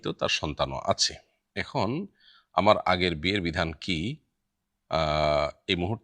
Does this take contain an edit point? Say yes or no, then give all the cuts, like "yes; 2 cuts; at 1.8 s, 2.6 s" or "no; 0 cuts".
no; 0 cuts